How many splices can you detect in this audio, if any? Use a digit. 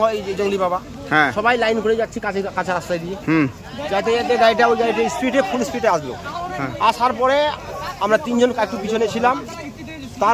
0